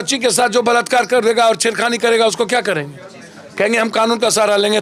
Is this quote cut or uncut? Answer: uncut